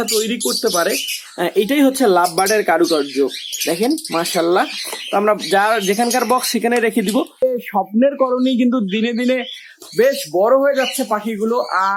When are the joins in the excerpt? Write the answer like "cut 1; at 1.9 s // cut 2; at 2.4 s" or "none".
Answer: none